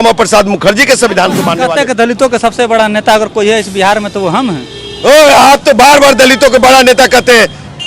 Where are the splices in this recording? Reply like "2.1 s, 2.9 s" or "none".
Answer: 1.6 s